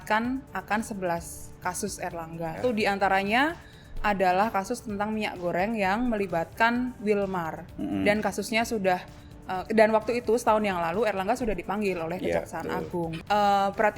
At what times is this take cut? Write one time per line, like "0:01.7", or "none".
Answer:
0:02.6
0:13.2